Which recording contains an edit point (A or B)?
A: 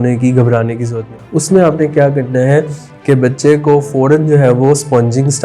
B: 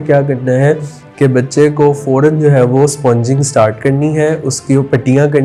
A